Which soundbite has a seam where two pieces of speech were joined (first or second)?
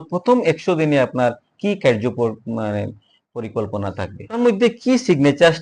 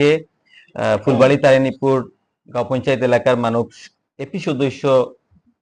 first